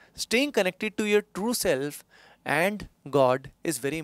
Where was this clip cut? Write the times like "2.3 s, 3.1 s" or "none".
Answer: none